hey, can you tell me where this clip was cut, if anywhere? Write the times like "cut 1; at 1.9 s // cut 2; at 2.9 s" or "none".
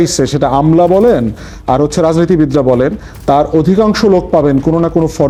none